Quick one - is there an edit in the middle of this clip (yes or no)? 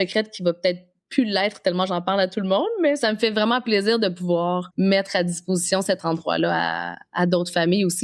yes